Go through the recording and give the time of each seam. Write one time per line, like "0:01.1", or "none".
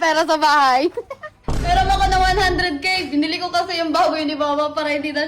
0:01.6